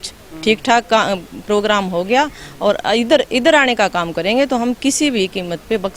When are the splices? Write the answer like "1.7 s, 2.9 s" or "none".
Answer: none